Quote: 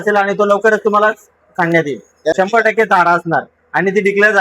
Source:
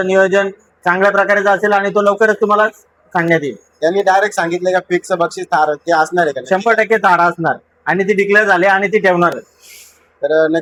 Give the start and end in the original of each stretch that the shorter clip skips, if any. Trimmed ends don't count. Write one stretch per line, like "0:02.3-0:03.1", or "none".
0:03.9-0:06.5

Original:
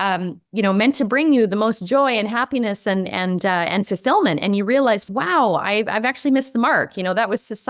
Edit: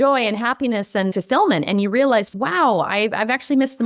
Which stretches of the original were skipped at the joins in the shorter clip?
0:03.0-0:03.9

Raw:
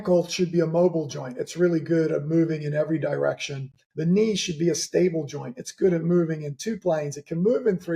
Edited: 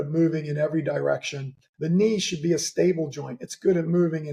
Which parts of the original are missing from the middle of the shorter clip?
none

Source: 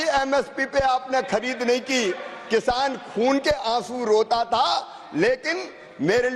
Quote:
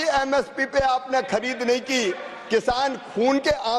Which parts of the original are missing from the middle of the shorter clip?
none

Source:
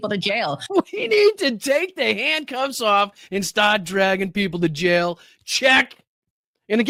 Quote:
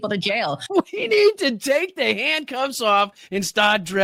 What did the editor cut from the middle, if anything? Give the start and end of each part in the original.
none

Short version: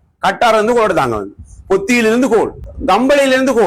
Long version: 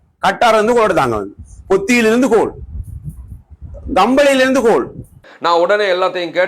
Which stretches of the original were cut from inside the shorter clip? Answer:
0:02.7-0:03.7

